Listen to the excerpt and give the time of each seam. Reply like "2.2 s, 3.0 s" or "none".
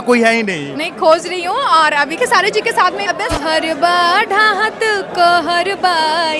2.2 s, 3.3 s